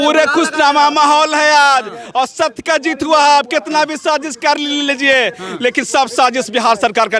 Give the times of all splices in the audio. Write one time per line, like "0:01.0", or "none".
none